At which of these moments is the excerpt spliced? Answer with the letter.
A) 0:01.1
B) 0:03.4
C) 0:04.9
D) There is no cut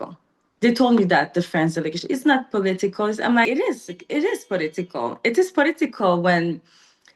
B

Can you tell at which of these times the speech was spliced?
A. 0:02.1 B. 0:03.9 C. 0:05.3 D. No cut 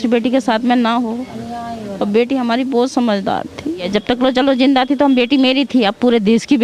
B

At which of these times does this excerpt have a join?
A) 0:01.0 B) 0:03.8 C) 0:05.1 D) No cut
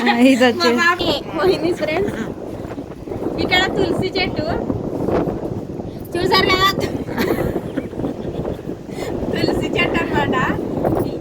A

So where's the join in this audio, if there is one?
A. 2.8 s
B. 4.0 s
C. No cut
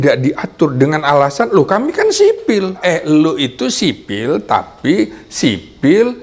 A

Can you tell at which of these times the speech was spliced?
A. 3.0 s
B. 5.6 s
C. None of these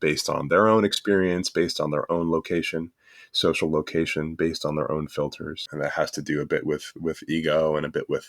B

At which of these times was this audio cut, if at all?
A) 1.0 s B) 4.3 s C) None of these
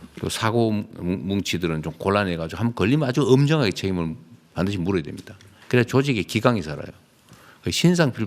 C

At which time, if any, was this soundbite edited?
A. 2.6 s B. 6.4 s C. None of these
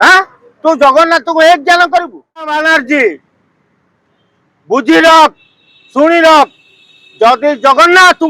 A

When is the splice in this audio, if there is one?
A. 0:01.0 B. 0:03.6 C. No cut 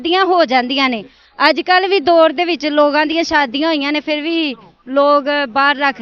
C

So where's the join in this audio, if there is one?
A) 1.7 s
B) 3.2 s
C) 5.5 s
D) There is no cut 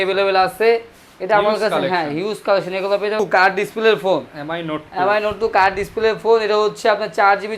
B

